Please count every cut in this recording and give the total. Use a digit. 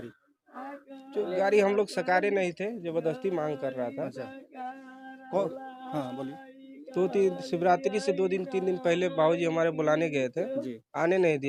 0